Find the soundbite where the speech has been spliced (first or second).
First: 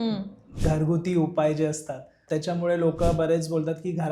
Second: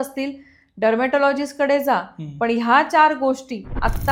first